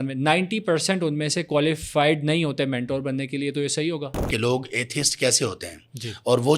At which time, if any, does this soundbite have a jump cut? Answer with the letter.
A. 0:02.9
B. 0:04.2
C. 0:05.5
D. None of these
B